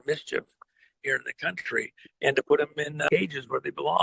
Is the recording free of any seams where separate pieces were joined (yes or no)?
no